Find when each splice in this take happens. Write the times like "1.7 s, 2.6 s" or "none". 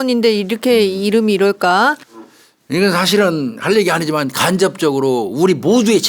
2.1 s